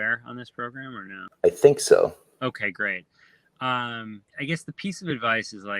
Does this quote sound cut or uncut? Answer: cut